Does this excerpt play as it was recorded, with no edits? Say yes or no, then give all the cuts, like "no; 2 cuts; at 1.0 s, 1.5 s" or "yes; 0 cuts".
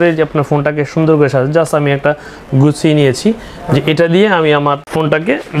yes; 0 cuts